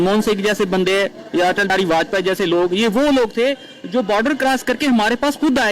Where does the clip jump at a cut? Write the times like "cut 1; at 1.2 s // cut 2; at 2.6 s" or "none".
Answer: cut 1; at 1.7 s